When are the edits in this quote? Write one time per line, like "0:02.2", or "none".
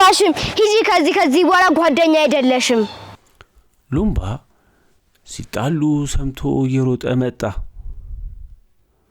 0:03.2

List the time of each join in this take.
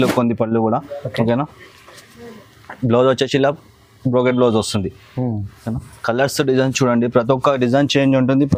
none

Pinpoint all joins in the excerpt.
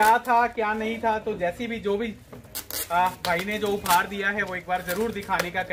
none

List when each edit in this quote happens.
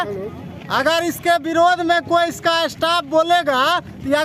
none

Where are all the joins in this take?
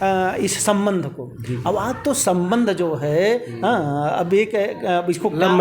none

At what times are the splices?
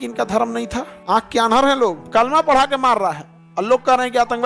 0:00.9
0:02.0

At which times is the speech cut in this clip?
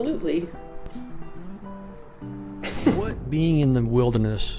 0:03.0

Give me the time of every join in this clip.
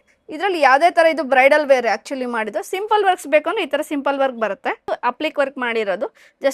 0:04.9

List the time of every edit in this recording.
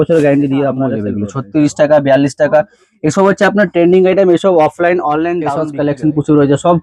0:01.2
0:05.6

